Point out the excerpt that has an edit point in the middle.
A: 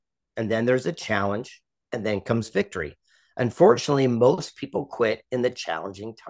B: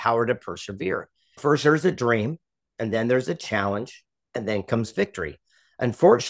B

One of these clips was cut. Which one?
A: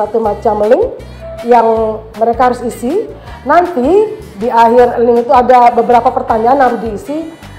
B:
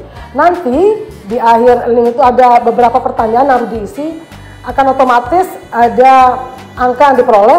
A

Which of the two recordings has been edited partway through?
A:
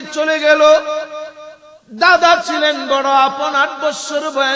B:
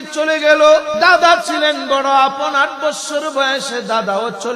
B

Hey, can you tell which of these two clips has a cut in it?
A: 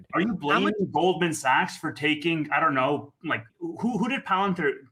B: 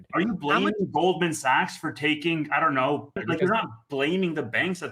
B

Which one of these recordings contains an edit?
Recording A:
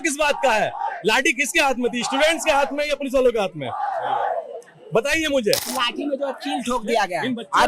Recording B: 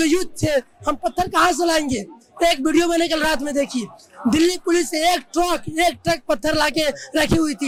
A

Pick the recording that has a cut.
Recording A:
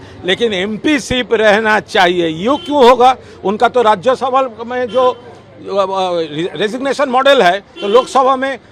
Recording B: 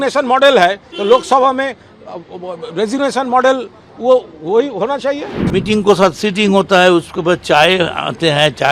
B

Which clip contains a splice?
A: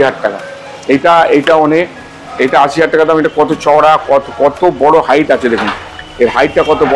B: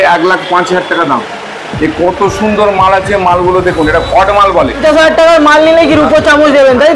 B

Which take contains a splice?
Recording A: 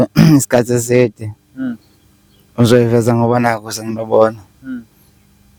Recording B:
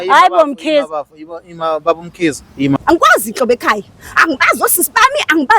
B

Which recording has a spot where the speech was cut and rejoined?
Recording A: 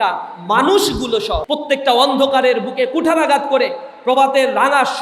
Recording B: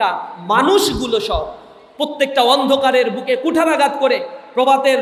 A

